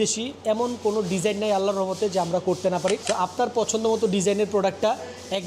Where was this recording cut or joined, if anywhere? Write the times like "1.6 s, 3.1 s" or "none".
3.0 s